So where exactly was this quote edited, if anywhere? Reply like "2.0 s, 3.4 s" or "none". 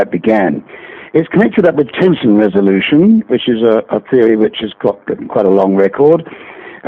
none